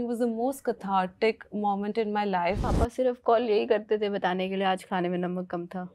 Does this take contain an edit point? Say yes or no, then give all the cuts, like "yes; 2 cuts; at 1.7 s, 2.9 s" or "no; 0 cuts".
yes; 1 cut; at 2.6 s